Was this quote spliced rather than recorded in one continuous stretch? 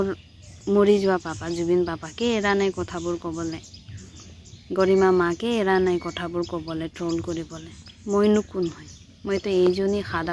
no; 0 cuts

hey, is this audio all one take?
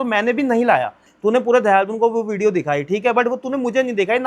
no; 1 cut; at 1.1 s

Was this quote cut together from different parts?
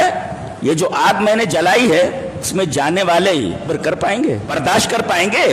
yes; 3 cuts; at 2.5 s, 3.7 s, 4.5 s

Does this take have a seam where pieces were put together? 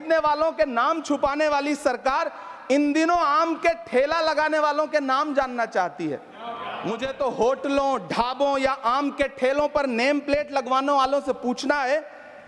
yes; 1 cut; at 6.7 s

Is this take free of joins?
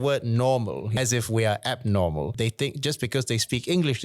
no; 2 cuts; at 0.9 s, 2.3 s

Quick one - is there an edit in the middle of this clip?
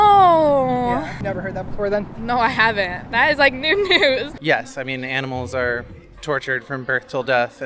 yes; 2 cuts; at 1.2 s, 4.4 s

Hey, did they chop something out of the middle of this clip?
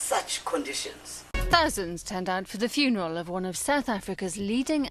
yes; 1 cut; at 1.3 s

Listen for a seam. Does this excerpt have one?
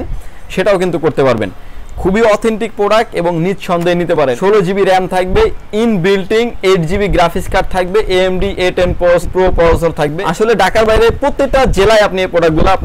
yes; 3 cuts; at 4.4 s, 9.3 s, 10.2 s

